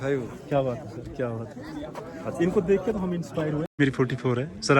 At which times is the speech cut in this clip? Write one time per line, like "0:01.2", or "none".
0:03.7